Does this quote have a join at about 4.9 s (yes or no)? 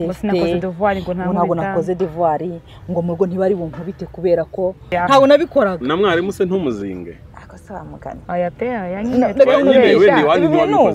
yes